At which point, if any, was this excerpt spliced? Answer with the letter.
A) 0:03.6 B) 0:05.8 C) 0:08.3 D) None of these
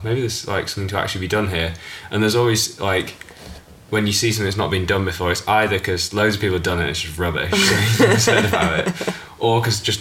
D